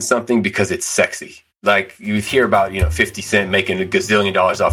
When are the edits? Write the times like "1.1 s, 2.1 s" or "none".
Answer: none

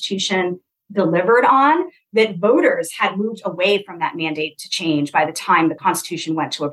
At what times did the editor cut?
5.8 s

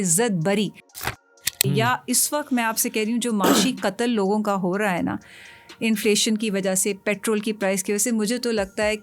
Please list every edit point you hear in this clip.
1.0 s

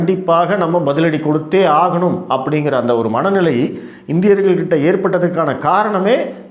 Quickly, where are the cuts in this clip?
none

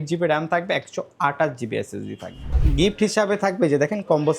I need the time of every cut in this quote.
2.6 s

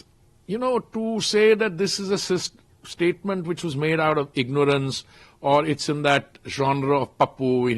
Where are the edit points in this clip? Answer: none

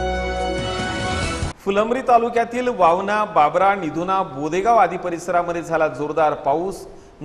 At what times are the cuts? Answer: 1.5 s

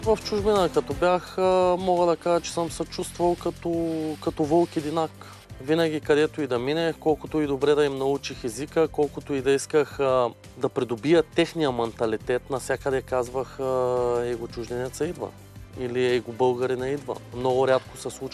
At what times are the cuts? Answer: none

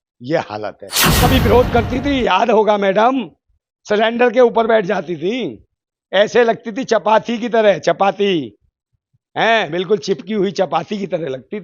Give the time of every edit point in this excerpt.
1.1 s

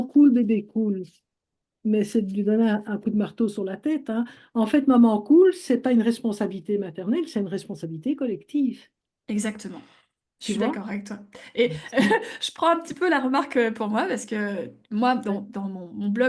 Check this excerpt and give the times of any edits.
none

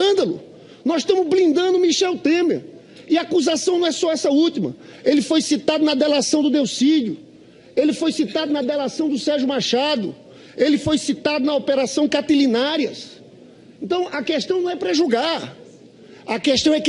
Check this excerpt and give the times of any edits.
7.2 s

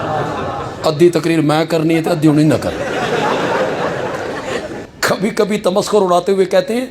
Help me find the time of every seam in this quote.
4.9 s

